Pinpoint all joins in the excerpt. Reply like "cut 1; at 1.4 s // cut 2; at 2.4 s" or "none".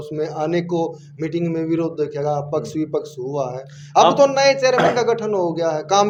none